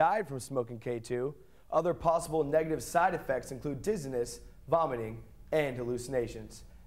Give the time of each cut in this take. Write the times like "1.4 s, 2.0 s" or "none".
none